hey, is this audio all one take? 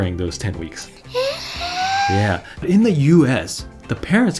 no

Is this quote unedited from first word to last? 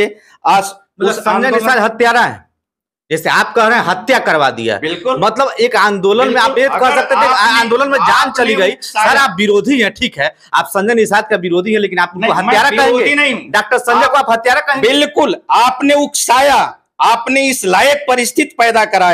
yes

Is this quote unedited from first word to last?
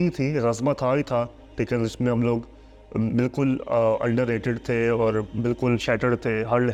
yes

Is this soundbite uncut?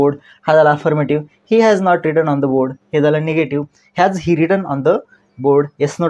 yes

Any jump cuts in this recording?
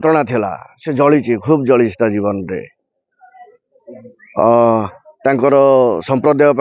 no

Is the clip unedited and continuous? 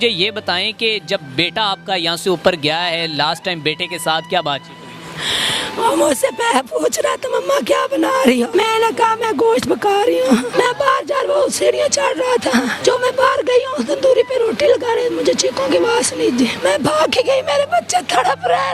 no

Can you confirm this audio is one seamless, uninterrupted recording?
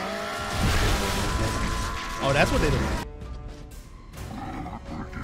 no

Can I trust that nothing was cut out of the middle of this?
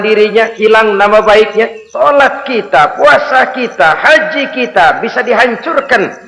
no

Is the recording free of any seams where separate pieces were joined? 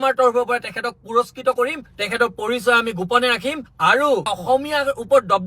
no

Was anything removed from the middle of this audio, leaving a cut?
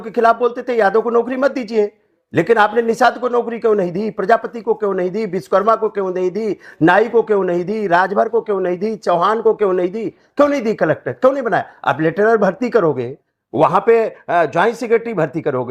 no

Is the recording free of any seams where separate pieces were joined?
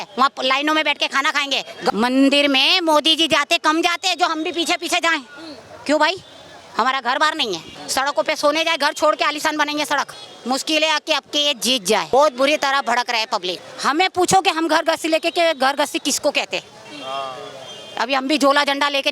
no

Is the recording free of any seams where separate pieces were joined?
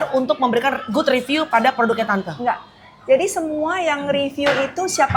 yes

